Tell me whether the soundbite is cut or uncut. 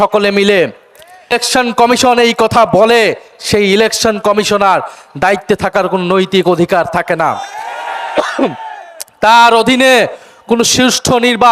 cut